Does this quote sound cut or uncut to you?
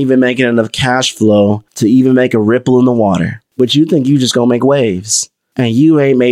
cut